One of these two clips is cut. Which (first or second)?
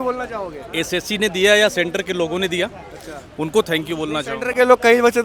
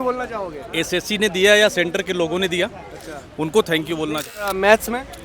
second